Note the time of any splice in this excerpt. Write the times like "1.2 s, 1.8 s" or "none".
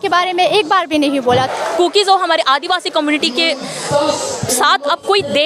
1.5 s